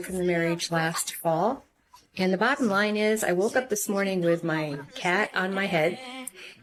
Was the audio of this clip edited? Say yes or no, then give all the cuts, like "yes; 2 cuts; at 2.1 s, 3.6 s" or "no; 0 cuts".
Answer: no; 0 cuts